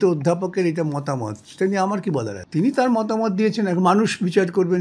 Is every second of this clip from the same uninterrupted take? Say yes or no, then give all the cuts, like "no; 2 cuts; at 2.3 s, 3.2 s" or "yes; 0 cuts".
no; 1 cut; at 2.4 s